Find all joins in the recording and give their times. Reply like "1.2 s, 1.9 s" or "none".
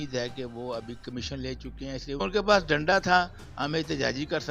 2.2 s

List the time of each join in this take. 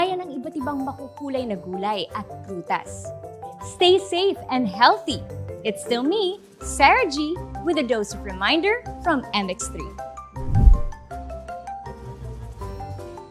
none

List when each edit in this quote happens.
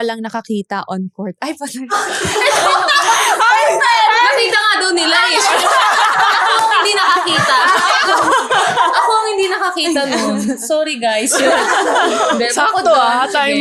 none

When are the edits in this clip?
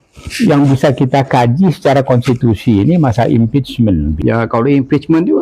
4.2 s

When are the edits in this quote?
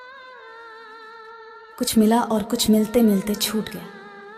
none

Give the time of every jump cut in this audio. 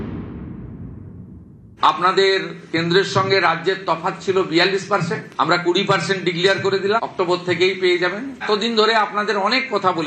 1.7 s

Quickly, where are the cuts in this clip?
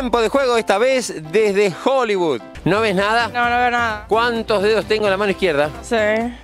2.5 s

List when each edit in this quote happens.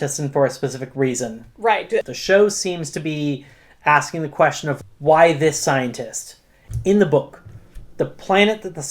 2.0 s, 4.7 s, 6.6 s

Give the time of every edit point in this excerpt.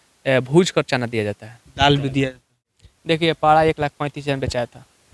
2.6 s

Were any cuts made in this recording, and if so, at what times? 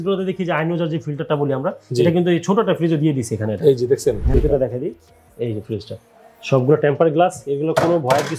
4.3 s

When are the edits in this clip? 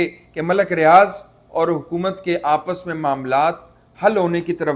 none

